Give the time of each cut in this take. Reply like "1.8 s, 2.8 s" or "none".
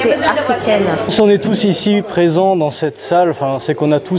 1.1 s